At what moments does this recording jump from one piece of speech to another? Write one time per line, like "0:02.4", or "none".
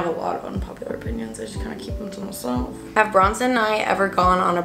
0:02.8

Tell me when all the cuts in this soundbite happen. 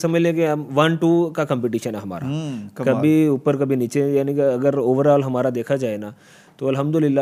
none

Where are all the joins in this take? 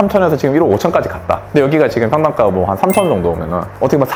none

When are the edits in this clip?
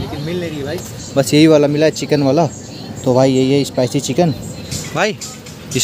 0:04.9

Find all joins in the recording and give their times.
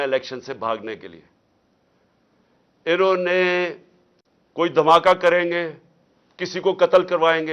none

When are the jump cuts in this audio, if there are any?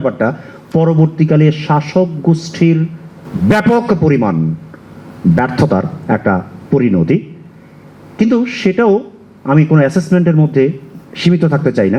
none

